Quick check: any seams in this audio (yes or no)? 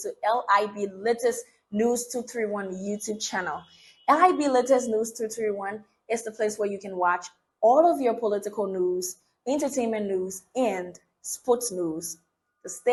no